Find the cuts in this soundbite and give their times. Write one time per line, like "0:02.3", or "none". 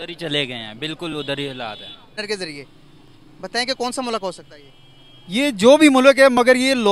0:02.2